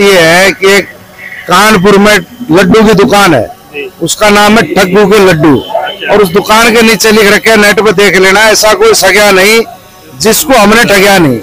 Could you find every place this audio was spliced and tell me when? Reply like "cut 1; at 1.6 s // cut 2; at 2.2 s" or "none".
none